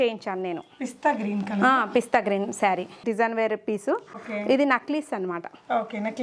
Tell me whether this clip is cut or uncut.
cut